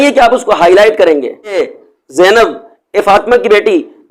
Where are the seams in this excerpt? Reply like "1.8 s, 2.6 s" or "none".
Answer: 1.6 s